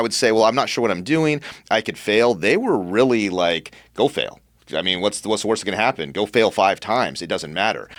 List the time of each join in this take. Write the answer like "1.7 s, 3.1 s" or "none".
none